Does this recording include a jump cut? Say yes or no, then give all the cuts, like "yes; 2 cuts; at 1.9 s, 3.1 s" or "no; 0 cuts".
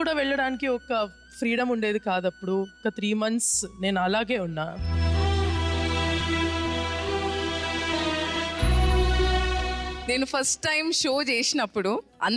yes; 3 cuts; at 2.8 s, 4.8 s, 10.0 s